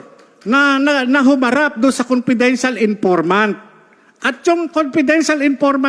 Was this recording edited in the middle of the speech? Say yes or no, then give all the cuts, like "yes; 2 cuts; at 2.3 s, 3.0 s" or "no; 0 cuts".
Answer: no; 0 cuts